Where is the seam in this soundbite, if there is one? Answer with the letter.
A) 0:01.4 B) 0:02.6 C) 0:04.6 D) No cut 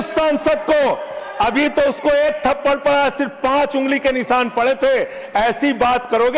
D